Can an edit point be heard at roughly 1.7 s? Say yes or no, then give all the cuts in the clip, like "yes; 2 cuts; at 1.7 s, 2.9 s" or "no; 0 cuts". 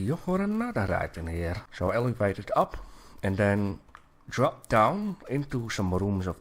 yes; 1 cut; at 1.7 s